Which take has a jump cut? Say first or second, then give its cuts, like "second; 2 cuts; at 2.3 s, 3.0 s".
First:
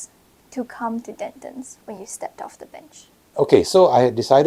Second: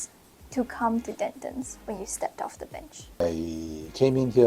second; 1 cut; at 3.1 s